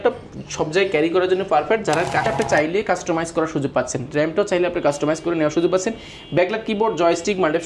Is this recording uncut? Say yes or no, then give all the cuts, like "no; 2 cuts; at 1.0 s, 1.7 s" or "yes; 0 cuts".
no; 1 cut; at 2.3 s